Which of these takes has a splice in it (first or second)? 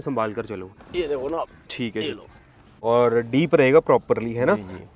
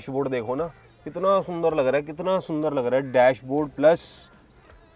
first